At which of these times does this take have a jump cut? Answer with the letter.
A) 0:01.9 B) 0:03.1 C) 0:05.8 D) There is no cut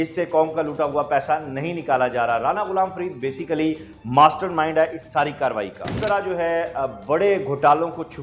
C